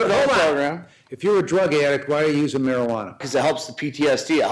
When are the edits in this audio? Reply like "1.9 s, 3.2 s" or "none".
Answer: 3.2 s